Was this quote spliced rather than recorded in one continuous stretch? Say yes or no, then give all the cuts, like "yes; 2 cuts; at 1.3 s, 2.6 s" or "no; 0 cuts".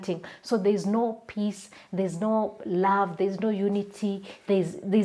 no; 0 cuts